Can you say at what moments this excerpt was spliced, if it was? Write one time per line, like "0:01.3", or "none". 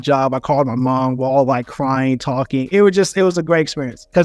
none